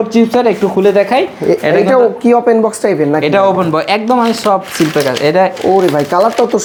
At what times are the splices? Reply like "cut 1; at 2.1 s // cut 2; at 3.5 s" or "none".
none